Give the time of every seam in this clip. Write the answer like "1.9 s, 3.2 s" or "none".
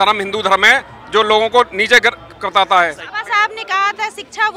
3.1 s